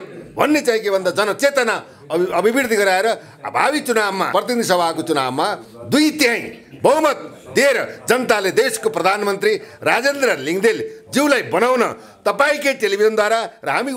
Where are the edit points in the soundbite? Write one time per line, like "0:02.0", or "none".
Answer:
0:04.3